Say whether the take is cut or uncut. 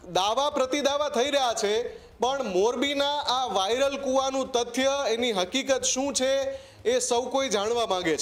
uncut